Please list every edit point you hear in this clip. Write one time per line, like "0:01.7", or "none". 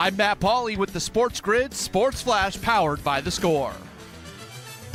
none